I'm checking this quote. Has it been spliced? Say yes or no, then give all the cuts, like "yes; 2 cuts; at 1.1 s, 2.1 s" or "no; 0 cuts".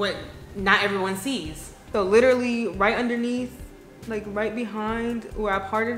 no; 0 cuts